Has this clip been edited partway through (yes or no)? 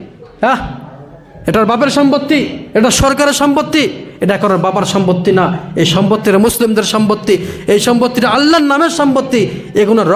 no